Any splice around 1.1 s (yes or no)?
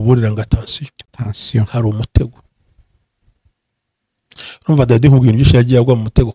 no